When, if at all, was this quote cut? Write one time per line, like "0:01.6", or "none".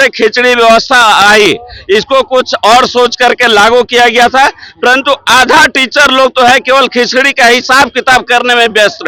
none